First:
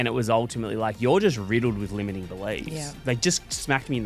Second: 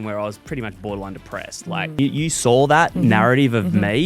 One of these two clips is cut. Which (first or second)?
second